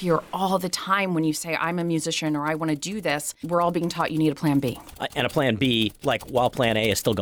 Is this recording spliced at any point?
yes; 1 cut; at 3.4 s

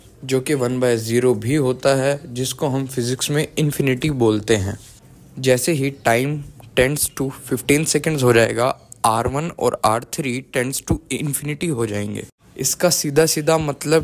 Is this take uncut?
yes; 0 cuts

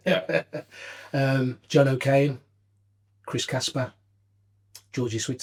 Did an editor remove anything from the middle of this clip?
no; 0 cuts

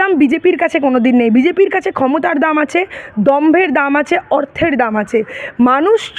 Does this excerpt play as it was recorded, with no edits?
yes; 0 cuts

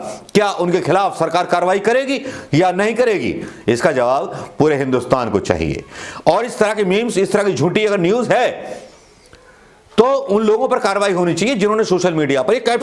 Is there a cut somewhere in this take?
no; 0 cuts

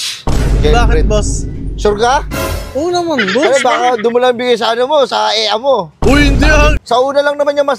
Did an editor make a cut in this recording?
yes; 1 cut; at 6.8 s

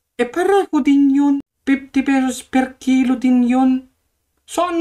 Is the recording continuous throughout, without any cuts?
no; 1 cut; at 1.4 s

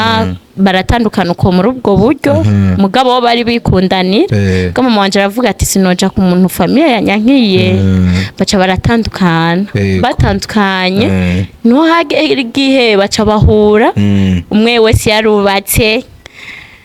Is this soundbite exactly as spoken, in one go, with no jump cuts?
yes; 0 cuts

